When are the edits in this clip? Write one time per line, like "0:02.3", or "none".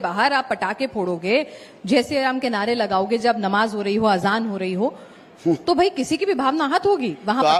none